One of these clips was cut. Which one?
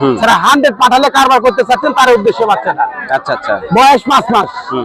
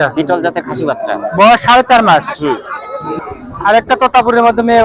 second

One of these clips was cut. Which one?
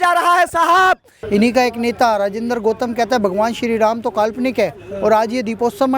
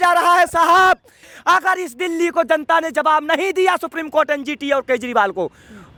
first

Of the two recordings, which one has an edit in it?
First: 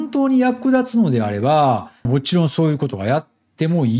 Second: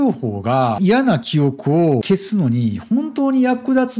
second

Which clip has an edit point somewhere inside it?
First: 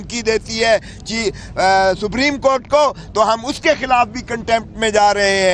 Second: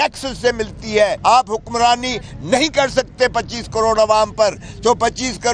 second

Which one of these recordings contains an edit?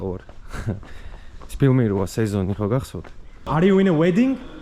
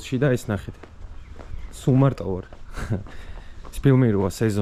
first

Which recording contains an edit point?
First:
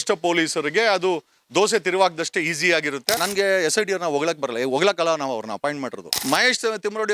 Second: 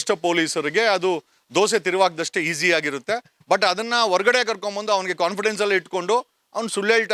first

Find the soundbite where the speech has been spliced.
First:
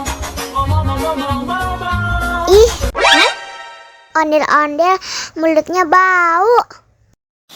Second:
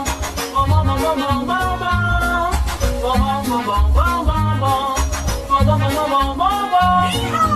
first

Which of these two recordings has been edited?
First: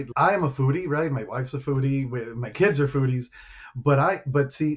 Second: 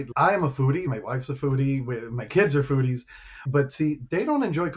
second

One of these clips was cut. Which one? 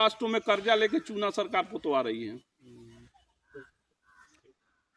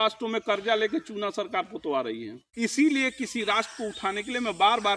second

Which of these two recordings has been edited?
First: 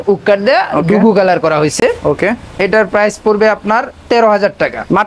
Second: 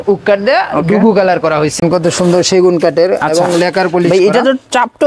second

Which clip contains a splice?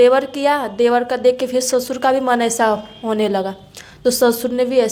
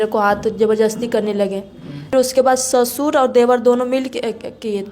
second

